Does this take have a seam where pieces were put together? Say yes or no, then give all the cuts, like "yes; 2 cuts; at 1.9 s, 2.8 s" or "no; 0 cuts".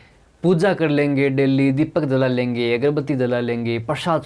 no; 0 cuts